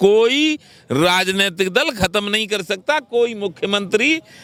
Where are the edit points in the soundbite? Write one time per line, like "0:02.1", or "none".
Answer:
none